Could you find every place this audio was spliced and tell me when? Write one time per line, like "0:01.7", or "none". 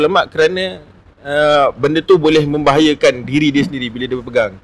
none

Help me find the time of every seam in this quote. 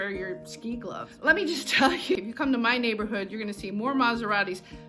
0:01.1

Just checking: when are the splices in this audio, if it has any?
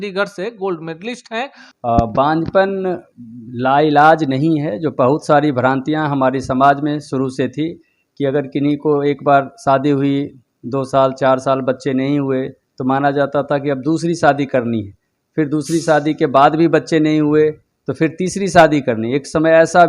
0:01.6

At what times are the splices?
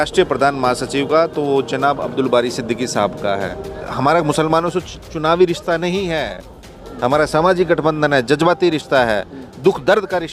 0:03.8

